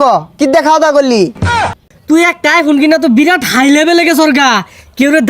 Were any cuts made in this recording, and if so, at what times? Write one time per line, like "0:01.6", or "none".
0:01.5